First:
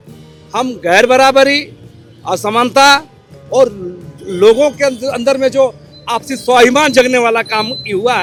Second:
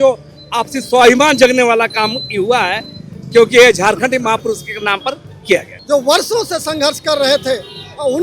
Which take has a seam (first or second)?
second